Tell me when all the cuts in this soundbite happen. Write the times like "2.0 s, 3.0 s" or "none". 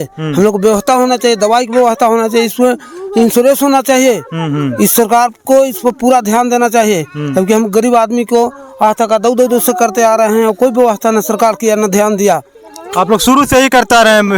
none